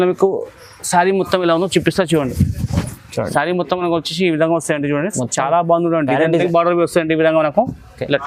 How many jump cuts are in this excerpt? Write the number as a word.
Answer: one